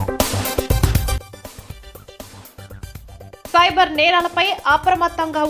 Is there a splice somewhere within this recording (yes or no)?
yes